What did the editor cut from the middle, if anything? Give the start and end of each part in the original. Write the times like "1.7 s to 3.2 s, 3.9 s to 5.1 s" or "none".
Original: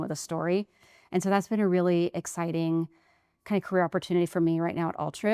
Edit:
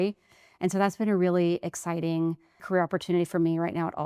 3.2 s to 3.7 s